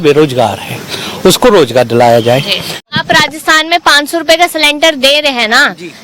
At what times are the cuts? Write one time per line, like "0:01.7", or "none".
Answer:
0:02.9